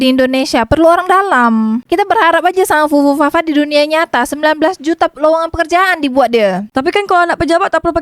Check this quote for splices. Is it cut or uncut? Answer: cut